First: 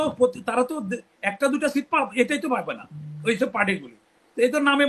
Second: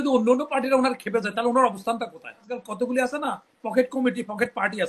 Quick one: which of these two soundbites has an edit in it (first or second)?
second